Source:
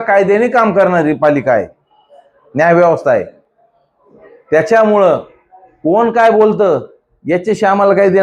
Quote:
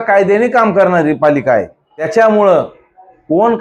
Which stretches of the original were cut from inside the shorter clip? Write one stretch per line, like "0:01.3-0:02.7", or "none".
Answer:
0:02.1-0:04.6